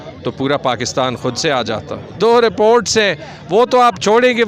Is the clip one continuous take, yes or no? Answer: no